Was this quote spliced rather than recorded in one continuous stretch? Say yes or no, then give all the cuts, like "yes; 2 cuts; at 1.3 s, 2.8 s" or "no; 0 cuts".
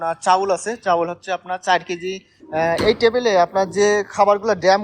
yes; 1 cut; at 2.4 s